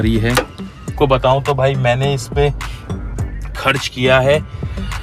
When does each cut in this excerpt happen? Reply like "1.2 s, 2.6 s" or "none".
0.9 s